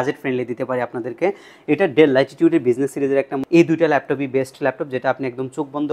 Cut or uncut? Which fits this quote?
cut